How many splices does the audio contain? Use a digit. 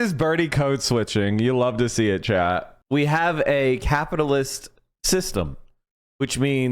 1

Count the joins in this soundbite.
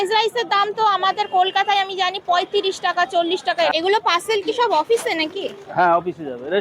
1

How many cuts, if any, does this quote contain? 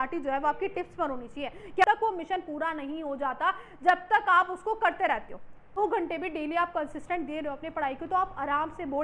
2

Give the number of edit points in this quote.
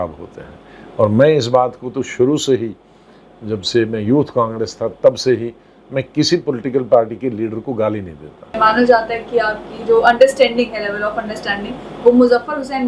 1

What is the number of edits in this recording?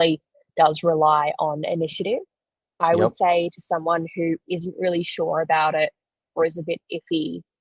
0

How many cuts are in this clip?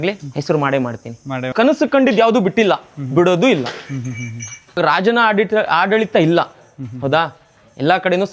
2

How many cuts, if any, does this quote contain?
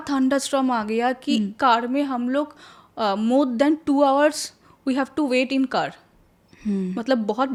0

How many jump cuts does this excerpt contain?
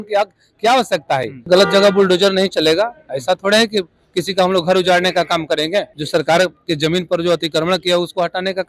2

